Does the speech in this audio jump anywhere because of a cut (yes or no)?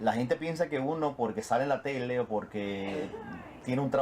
yes